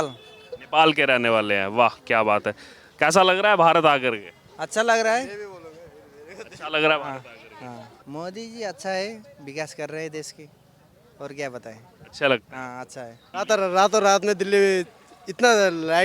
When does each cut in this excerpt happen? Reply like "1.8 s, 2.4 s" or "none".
7.9 s, 13.4 s